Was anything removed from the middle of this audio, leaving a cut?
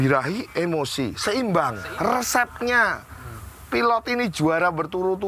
yes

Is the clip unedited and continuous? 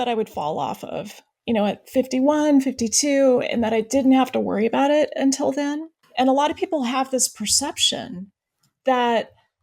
no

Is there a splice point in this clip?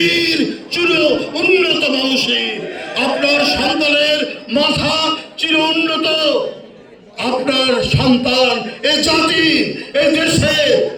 no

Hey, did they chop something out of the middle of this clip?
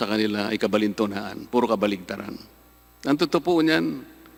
no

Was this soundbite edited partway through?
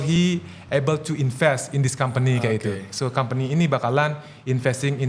no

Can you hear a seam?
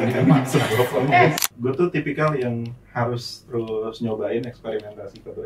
yes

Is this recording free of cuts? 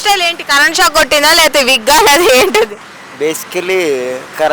yes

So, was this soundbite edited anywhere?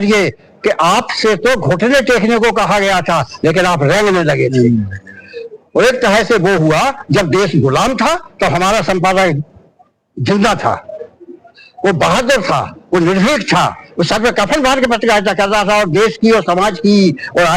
no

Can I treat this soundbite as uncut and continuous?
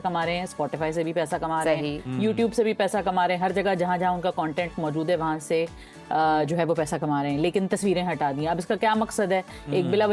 yes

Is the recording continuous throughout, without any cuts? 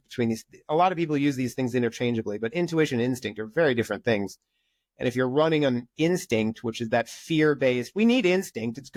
yes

